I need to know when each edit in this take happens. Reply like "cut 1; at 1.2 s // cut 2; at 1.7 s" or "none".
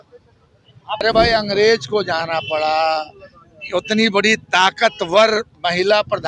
cut 1; at 1.0 s